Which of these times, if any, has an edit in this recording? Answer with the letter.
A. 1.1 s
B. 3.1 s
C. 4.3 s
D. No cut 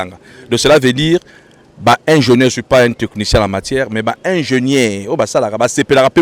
D